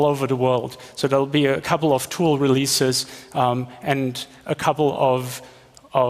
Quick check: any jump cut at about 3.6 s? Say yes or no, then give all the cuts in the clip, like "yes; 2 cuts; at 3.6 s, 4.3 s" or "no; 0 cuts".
no; 1 cut; at 1.6 s